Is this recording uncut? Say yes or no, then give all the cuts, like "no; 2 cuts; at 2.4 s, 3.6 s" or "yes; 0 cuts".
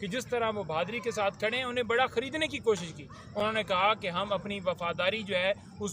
yes; 0 cuts